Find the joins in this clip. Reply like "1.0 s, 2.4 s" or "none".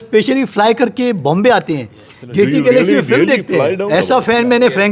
3.8 s